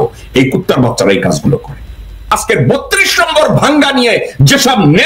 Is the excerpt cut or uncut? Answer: cut